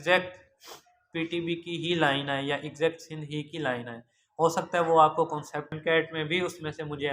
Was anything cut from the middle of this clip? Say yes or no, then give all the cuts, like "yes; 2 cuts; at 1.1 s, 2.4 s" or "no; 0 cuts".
yes; 1 cut; at 5.8 s